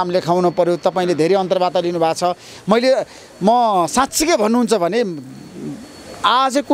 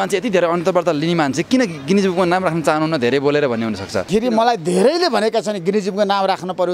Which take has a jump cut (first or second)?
second